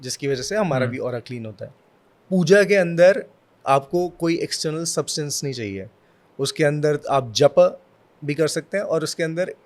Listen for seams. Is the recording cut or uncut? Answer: cut